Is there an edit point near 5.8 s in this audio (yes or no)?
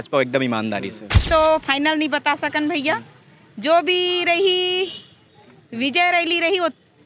no